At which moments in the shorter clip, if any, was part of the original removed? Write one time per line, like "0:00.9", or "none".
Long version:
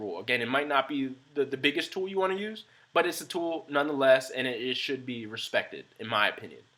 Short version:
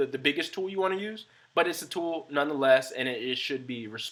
none